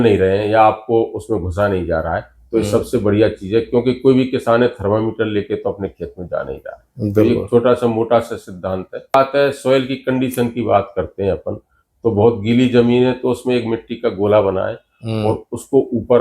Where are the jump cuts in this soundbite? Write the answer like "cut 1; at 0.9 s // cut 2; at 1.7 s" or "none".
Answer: cut 1; at 9.1 s